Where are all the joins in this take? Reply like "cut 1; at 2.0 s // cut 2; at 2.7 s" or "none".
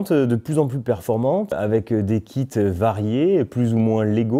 cut 1; at 1.6 s